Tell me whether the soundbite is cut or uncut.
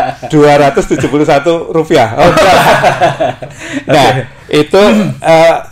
uncut